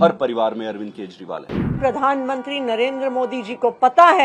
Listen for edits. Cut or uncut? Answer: cut